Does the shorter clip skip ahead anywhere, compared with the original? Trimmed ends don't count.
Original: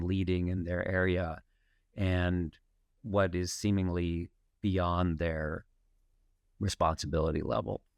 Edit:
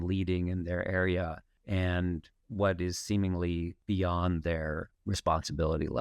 yes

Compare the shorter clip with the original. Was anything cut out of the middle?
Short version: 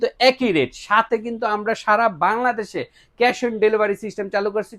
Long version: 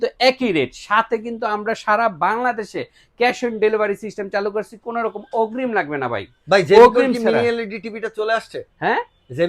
no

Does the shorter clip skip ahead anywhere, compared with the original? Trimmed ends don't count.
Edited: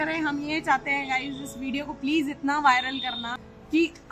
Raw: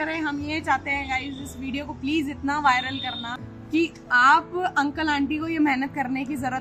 no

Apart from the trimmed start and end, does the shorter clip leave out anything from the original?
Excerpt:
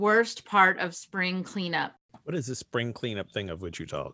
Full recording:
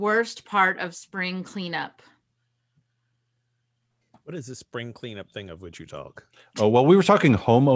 yes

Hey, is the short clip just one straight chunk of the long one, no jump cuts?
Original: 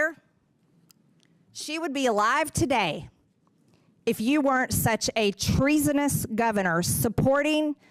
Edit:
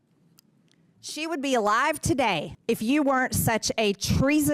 no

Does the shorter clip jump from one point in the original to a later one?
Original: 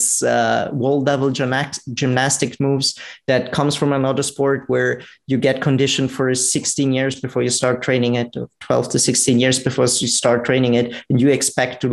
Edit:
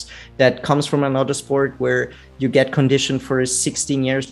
no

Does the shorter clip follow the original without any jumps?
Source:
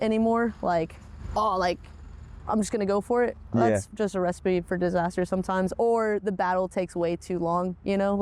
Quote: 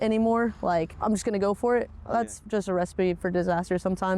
no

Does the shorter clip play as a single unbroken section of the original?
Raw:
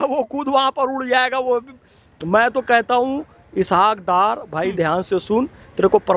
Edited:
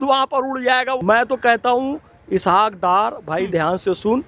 no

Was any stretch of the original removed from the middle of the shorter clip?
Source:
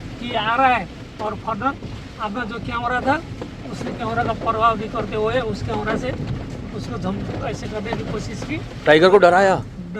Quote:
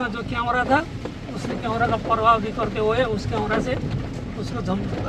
no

